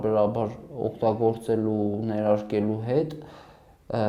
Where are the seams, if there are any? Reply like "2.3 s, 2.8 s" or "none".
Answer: none

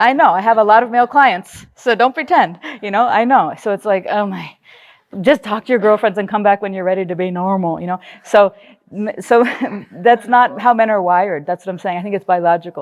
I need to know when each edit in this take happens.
none

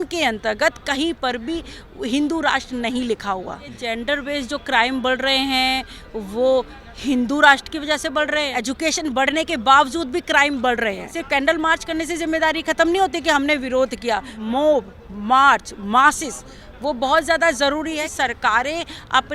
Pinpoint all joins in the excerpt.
3.8 s, 8.5 s, 11.1 s, 14.3 s, 18.0 s

